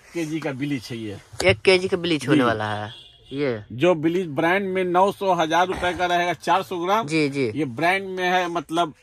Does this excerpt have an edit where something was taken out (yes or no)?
no